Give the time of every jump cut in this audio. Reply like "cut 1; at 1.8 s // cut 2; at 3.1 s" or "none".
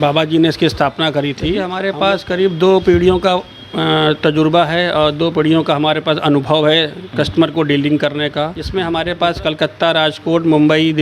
cut 1; at 1.7 s // cut 2; at 8.6 s